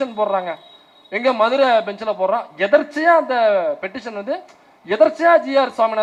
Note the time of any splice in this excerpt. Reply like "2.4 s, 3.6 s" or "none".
none